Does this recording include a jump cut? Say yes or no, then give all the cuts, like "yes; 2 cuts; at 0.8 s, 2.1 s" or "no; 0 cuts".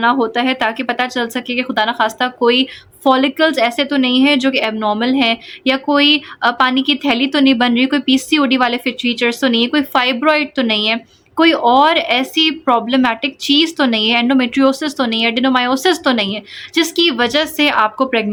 no; 0 cuts